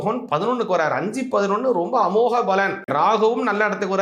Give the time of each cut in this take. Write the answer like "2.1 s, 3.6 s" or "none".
2.9 s